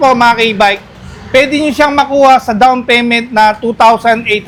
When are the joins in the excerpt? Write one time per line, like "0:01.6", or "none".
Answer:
none